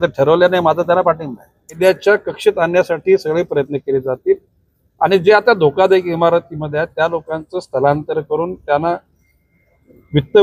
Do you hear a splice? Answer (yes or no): yes